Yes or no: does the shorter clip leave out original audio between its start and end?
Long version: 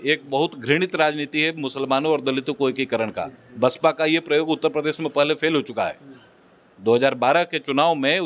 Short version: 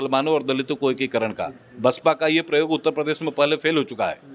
no